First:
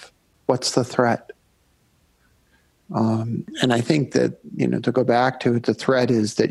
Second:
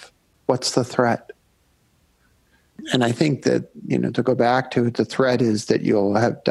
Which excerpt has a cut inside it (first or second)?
second